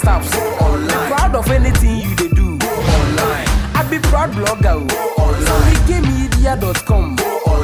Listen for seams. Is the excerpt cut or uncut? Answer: uncut